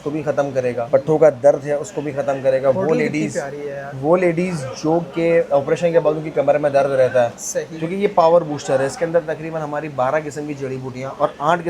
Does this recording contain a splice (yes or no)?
no